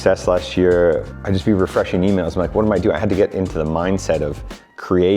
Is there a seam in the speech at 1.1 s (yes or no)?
yes